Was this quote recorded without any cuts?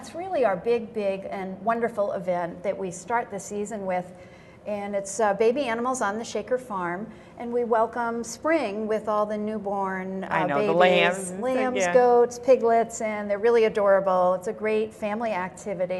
no; 1 cut; at 5.1 s

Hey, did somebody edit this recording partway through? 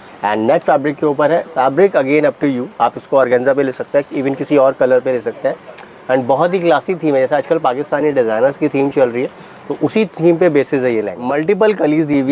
yes; 1 cut; at 11.2 s

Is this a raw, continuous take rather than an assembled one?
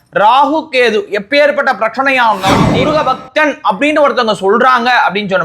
no; 1 cut; at 2.7 s

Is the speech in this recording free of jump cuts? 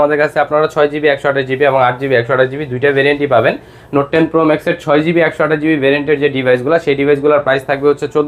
yes; 0 cuts

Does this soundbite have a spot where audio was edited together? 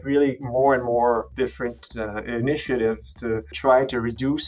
yes; 2 cuts; at 1.3 s, 3.5 s

